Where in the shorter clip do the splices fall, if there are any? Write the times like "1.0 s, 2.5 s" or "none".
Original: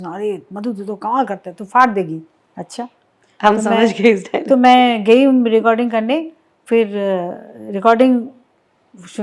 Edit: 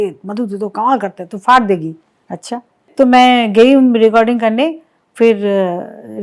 2.8 s